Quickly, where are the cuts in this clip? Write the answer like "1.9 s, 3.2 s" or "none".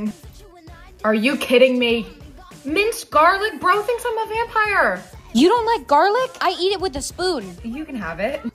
none